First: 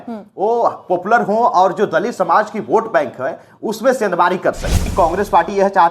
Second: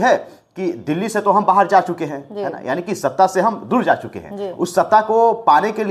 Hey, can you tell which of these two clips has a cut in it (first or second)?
first